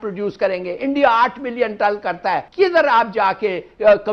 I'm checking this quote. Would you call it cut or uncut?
cut